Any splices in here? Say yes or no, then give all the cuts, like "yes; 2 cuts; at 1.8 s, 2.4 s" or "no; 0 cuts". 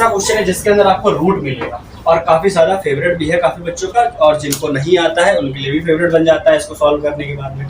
yes; 1 cut; at 1.9 s